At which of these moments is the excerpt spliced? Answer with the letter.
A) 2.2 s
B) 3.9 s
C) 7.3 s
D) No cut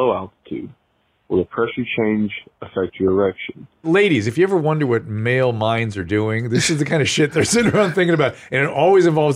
B